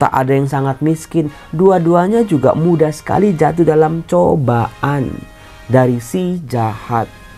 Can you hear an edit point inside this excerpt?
no; 0 cuts

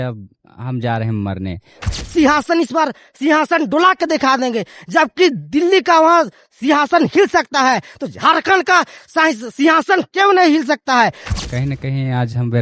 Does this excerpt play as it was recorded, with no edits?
no; 2 cuts; at 2.0 s, 11.3 s

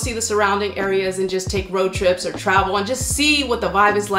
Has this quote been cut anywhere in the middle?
no; 0 cuts

